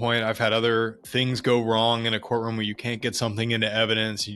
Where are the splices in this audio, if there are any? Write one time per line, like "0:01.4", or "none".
0:01.0